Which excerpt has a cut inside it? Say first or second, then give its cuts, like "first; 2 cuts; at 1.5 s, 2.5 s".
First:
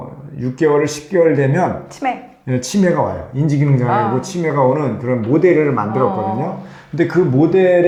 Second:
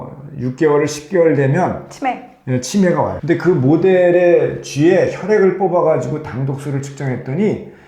second; 1 cut; at 3.2 s